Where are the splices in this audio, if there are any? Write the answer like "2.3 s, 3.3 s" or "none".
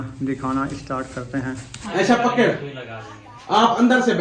1.9 s